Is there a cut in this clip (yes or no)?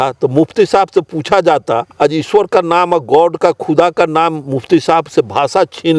yes